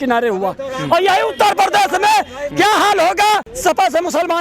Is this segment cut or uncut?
cut